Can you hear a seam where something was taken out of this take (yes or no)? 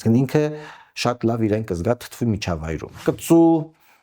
yes